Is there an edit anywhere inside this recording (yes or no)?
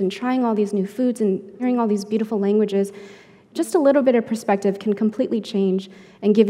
yes